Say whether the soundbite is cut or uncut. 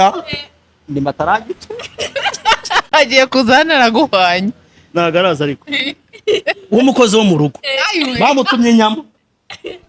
uncut